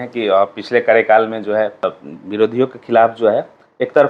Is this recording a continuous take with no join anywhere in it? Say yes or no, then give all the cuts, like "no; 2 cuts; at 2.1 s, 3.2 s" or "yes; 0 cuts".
no; 1 cut; at 2.1 s